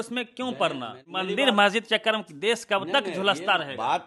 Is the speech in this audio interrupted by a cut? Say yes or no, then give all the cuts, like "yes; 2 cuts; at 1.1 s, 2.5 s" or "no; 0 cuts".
yes; 1 cut; at 1.1 s